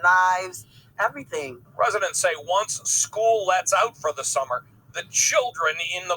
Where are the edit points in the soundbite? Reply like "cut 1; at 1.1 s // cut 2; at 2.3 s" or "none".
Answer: cut 1; at 1.6 s